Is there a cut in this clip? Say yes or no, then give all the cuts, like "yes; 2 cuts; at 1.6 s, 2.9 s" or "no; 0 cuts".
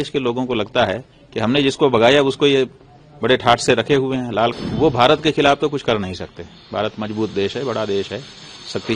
yes; 1 cut; at 4.5 s